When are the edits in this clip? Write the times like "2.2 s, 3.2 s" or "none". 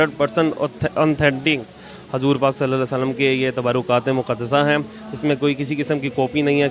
none